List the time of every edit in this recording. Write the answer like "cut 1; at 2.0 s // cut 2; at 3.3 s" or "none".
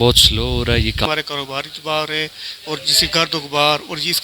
cut 1; at 1.1 s